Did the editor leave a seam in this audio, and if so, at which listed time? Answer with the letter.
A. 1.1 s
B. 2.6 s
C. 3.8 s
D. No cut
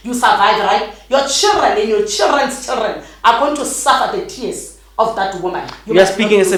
D